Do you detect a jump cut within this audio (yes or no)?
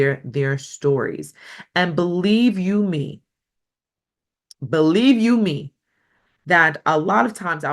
no